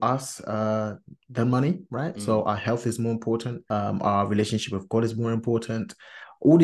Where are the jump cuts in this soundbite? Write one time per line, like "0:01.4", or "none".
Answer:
0:03.6